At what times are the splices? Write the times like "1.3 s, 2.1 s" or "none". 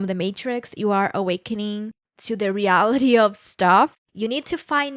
4.0 s